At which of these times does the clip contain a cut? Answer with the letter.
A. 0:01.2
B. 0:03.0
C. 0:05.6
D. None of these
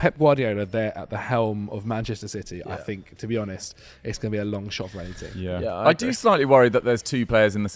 D